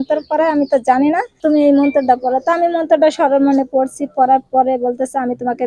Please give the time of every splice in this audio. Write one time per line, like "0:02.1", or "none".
0:01.4